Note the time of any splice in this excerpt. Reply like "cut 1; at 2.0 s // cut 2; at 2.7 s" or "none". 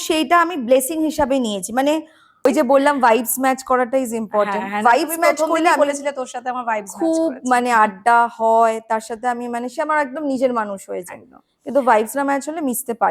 cut 1; at 2.3 s